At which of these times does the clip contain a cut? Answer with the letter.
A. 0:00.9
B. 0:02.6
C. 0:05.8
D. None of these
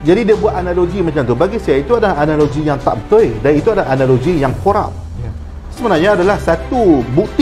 C